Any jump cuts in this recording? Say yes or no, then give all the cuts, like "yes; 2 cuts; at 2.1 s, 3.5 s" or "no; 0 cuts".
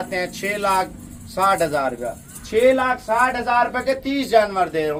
no; 0 cuts